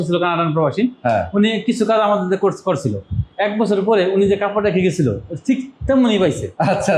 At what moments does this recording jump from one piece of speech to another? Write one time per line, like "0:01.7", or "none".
none

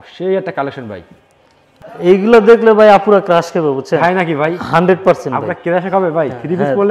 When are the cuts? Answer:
0:01.8

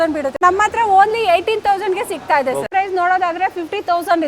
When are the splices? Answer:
0:02.6

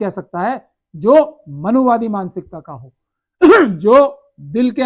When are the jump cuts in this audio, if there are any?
none

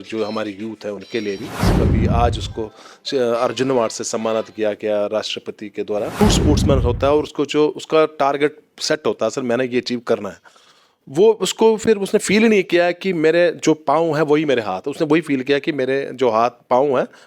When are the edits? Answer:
0:01.7
0:06.2

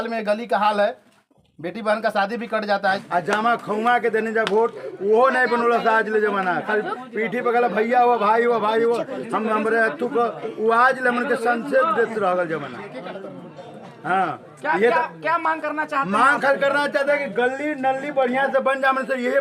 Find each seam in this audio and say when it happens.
0:03.0

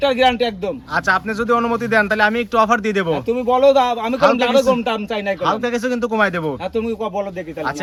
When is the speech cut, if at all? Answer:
none

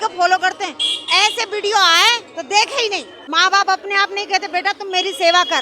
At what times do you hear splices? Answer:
0:03.2

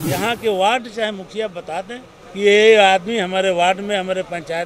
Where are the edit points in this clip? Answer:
0:02.1

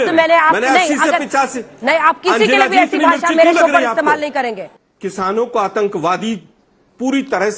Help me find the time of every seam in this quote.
0:04.7

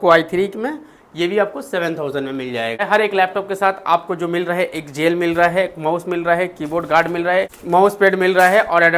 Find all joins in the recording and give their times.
0:02.8
0:07.6

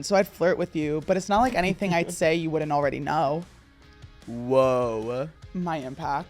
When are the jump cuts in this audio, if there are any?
0:05.4

